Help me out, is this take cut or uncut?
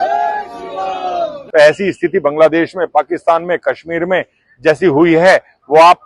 cut